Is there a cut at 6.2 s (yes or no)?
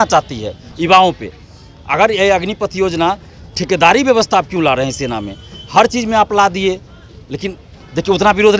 no